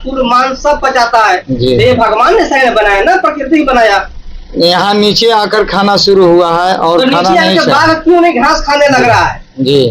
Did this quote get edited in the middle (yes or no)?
no